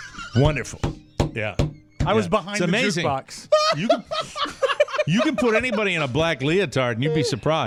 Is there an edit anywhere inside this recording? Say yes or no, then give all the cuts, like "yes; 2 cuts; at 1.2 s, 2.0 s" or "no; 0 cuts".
no; 0 cuts